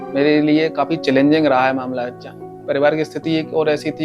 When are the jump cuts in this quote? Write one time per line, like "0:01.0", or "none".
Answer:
0:02.6